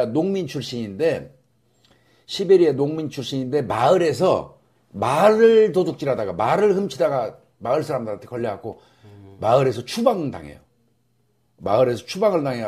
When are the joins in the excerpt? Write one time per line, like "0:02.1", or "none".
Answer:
0:09.8

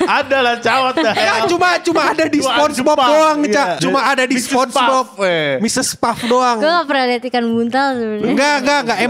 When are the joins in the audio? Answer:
0:03.8

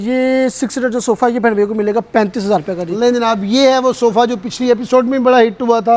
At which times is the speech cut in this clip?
none

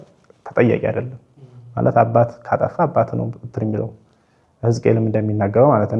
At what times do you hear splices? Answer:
none

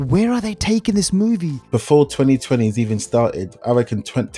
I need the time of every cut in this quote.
0:01.5

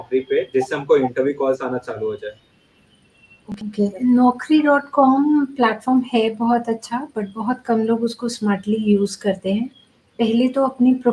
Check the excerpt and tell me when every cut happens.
none

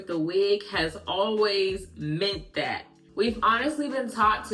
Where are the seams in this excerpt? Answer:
0:03.0

